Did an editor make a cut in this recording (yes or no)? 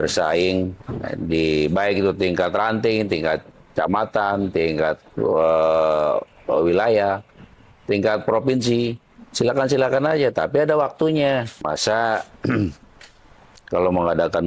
yes